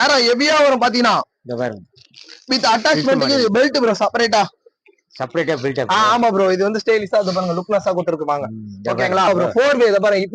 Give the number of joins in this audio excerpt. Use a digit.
1